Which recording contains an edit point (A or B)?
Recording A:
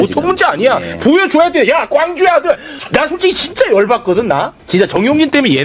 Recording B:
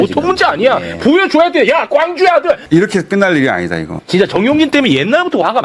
B